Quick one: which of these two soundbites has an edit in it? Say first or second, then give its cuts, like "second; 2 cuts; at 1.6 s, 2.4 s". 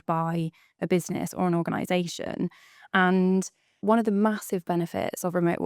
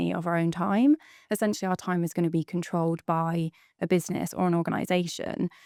first; 1 cut; at 3.8 s